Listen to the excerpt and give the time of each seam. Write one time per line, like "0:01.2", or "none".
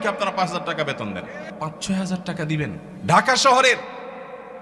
0:01.4
0:02.9